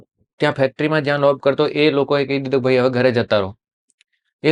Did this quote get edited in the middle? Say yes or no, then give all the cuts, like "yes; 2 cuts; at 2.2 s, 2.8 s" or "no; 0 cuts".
no; 0 cuts